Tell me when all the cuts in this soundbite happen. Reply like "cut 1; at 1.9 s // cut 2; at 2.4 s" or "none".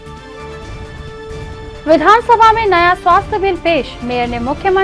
none